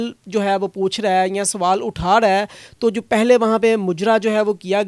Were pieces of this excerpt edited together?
no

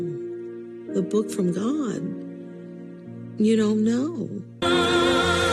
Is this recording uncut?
no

